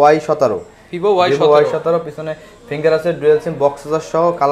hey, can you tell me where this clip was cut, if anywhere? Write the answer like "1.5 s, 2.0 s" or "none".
none